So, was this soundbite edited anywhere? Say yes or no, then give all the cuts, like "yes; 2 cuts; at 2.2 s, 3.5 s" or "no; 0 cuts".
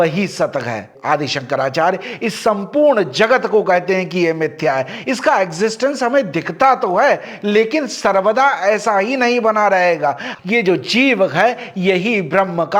yes; 2 cuts; at 0.9 s, 10.3 s